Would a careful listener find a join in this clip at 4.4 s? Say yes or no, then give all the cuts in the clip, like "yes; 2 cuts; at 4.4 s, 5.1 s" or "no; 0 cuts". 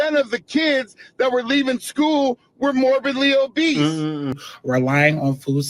yes; 1 cut; at 4.4 s